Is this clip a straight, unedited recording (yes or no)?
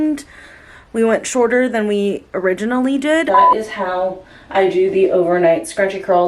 no